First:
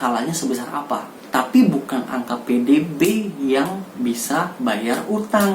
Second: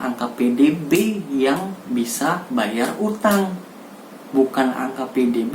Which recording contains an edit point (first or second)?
first